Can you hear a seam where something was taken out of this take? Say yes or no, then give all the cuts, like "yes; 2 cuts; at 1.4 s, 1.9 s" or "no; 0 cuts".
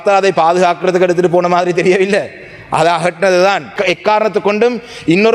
yes; 1 cut; at 3.7 s